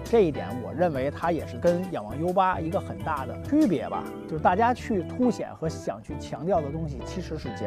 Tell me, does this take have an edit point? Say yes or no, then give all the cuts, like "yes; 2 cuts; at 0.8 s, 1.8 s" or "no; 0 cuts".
no; 0 cuts